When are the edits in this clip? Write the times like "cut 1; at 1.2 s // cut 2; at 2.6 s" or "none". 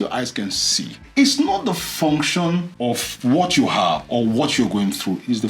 cut 1; at 1.0 s // cut 2; at 2.7 s

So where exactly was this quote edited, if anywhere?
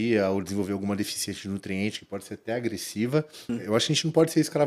cut 1; at 3.4 s

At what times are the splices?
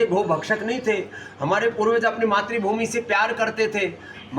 none

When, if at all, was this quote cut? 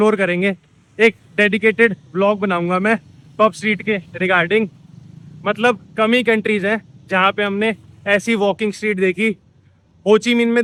none

